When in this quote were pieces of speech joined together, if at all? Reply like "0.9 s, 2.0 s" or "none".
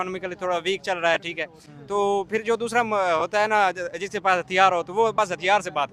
none